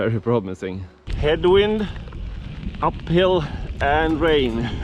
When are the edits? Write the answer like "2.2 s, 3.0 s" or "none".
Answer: 1.1 s